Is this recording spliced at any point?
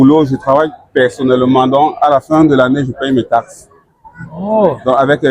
no; 0 cuts

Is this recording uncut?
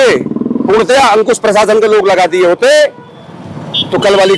yes; 0 cuts

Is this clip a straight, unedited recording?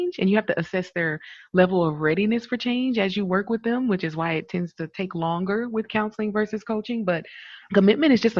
yes; 0 cuts

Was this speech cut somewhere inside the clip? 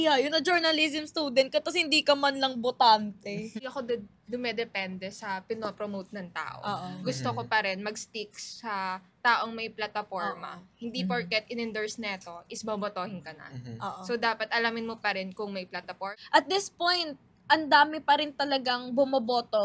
yes; 2 cuts; at 3.6 s, 16.0 s

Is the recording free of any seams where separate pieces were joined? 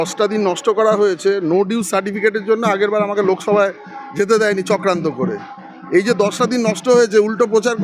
yes; 0 cuts

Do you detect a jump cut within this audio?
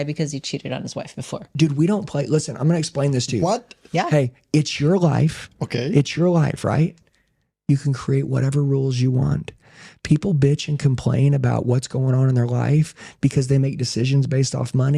no; 0 cuts

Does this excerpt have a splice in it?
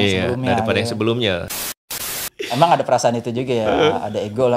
yes; 1 cut; at 1.9 s

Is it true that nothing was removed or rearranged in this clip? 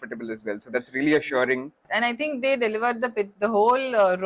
no; 1 cut; at 1.9 s

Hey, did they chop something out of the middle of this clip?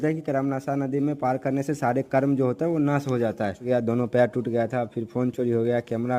yes; 1 cut; at 3.6 s

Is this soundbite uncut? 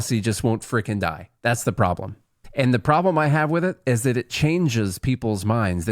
no; 1 cut; at 2.4 s

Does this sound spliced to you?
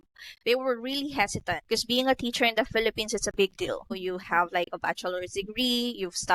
yes; 2 cuts; at 1.6 s, 4.0 s

